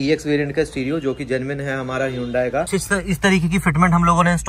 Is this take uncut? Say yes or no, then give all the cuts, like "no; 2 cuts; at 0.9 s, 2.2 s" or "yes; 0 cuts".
no; 1 cut; at 2.7 s